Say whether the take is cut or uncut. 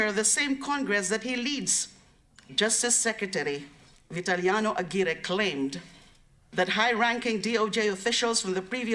uncut